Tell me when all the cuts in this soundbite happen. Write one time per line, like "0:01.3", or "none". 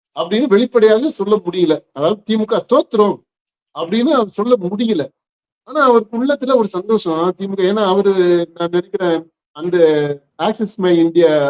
none

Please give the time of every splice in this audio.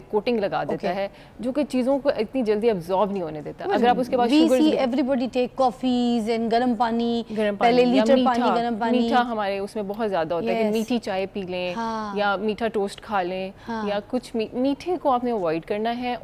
none

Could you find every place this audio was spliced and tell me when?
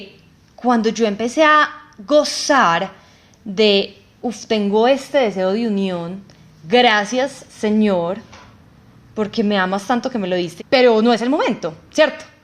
0:10.5

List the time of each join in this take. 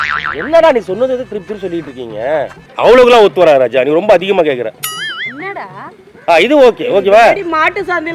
0:02.6

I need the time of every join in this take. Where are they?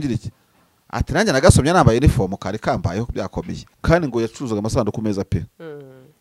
0:03.7

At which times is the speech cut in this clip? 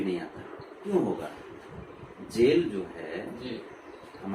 0:00.9

